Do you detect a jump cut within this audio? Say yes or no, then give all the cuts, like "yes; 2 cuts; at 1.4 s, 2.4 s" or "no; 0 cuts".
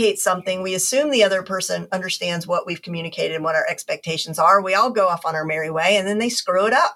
no; 0 cuts